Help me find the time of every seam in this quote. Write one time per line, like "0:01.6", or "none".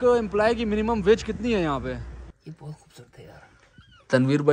0:02.2